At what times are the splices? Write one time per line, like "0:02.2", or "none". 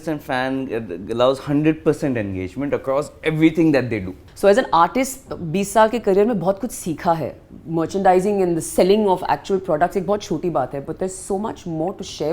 0:04.1